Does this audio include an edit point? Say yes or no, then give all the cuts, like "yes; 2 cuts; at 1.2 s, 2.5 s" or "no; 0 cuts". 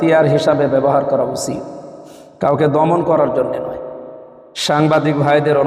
no; 0 cuts